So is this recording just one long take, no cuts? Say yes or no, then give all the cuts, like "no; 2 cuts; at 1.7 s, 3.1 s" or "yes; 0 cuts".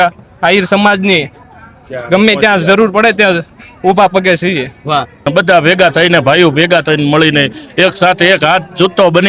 no; 1 cut; at 5.3 s